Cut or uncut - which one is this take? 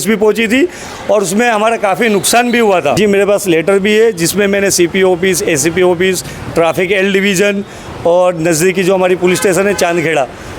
cut